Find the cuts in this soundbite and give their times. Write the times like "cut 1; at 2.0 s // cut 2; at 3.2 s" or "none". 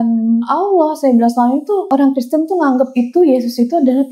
cut 1; at 1.8 s